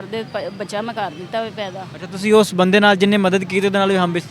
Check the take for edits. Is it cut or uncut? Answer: uncut